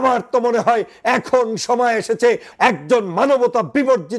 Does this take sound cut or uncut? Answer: cut